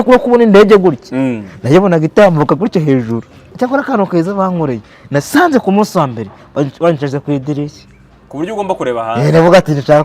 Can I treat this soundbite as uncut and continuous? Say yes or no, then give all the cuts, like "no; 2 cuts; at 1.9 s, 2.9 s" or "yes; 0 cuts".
no; 1 cut; at 3.4 s